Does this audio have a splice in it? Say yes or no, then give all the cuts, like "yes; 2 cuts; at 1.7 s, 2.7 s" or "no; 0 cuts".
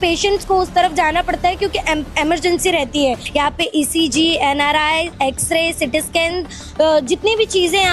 yes; 1 cut; at 3.2 s